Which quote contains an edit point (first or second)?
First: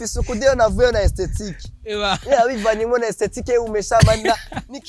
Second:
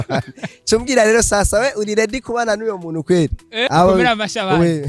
second